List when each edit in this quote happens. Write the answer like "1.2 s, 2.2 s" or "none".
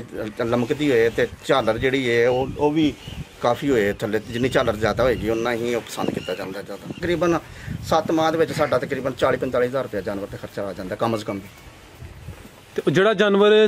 7.0 s